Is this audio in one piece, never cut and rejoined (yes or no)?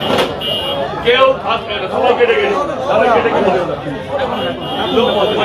yes